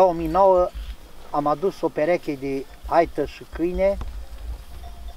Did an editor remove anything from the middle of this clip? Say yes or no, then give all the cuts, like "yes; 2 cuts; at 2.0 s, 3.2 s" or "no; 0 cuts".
no; 0 cuts